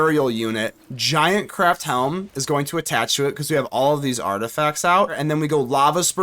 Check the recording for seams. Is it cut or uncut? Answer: cut